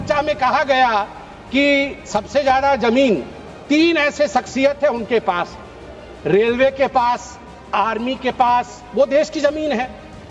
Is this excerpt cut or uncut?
uncut